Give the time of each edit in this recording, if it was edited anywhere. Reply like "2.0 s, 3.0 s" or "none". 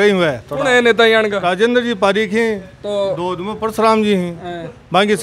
none